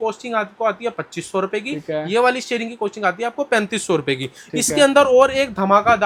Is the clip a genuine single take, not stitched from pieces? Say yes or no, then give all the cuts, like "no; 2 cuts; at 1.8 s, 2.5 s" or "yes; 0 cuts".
yes; 0 cuts